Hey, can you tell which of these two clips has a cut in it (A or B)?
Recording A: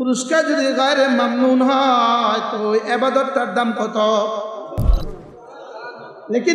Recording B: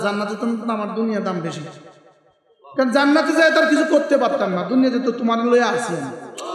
A